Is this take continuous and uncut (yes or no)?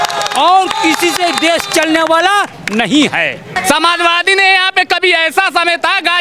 no